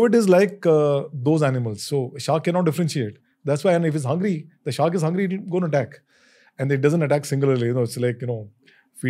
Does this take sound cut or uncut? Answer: uncut